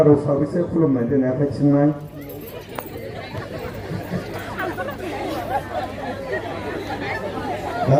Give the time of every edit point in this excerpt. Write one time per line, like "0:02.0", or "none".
none